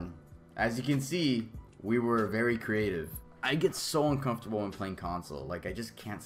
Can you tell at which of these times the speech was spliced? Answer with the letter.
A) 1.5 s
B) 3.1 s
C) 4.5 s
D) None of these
B